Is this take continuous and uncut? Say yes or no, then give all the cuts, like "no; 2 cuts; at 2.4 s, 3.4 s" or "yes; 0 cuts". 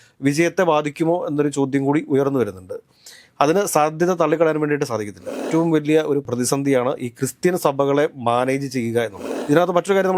no; 3 cuts; at 5.4 s, 6.3 s, 9.2 s